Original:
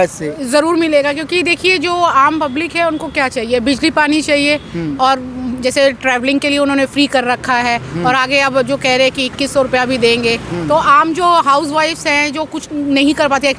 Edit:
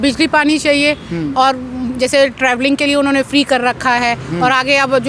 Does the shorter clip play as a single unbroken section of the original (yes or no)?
yes